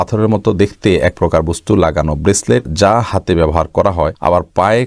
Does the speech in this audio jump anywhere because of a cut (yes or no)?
no